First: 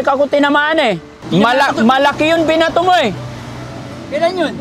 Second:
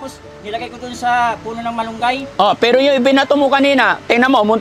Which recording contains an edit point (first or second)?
first